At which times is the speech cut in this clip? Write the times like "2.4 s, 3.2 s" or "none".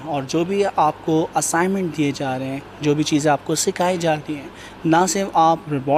none